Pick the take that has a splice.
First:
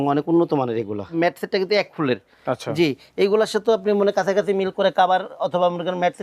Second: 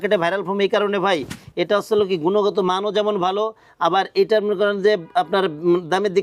first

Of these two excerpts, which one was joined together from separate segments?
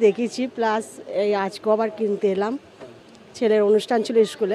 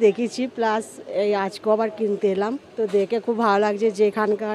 second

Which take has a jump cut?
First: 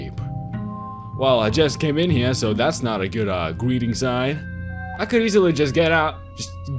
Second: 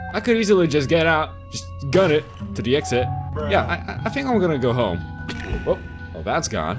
second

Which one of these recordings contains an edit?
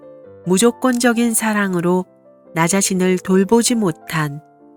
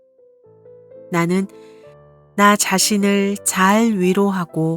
second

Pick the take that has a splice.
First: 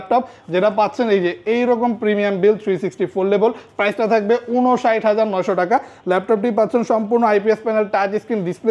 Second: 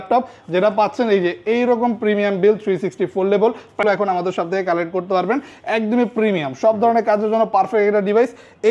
second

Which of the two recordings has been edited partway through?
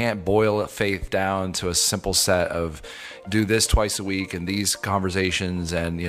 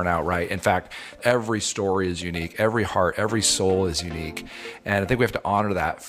second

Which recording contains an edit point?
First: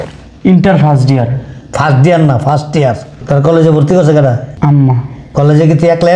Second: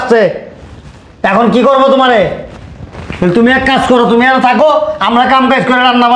first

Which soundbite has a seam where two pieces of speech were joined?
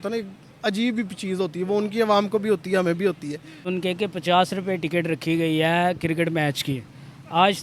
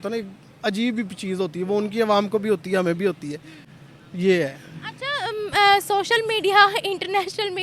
first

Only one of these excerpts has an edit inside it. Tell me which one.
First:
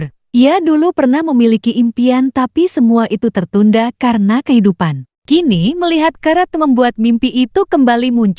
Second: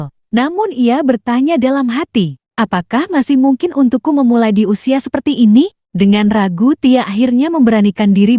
second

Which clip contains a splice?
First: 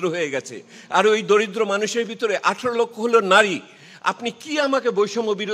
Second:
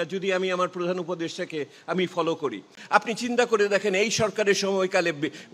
second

